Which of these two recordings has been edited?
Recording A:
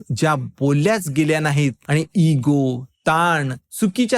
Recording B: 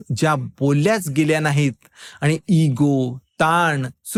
A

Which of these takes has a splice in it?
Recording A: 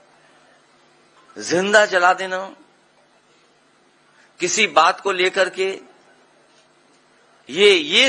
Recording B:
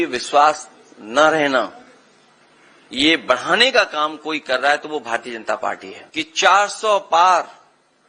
B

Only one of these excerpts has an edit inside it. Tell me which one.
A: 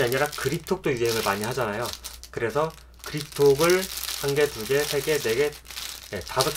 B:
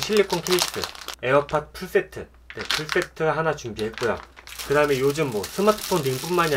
B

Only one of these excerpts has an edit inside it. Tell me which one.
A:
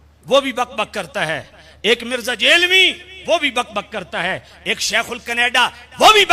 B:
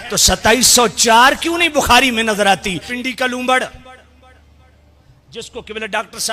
B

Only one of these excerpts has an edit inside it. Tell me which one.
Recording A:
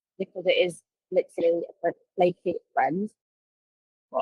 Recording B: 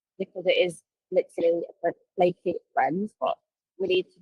B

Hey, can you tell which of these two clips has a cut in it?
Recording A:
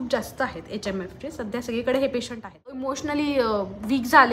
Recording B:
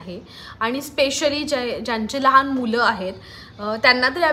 A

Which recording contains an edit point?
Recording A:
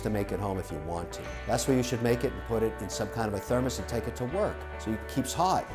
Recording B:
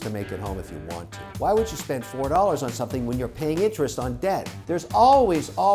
B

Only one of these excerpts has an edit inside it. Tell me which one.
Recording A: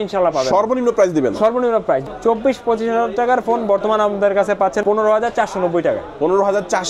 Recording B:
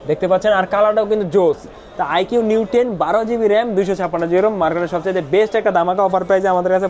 A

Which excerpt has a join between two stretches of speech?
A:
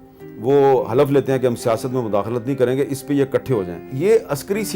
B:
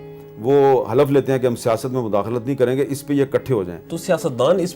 A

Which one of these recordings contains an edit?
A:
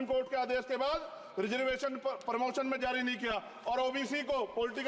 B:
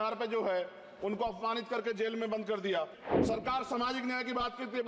B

